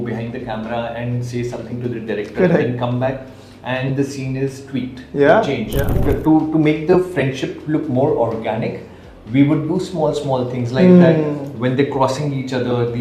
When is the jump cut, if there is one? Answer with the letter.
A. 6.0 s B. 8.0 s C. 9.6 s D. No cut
A